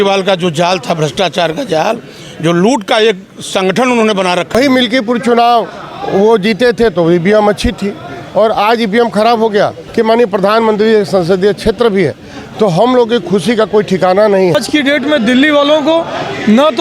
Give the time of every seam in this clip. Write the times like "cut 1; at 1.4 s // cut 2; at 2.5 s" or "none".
cut 1; at 4.5 s // cut 2; at 9.8 s // cut 3; at 14.6 s